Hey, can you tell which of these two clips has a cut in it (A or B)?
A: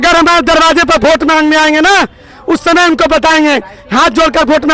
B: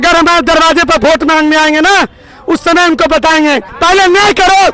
B